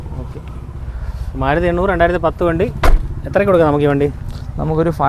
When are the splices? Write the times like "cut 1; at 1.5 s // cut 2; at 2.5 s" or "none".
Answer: none